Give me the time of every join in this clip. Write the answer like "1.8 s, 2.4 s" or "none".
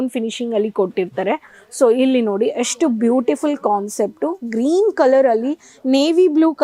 none